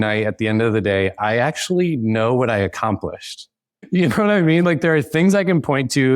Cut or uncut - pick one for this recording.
cut